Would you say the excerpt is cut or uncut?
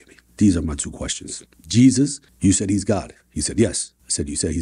uncut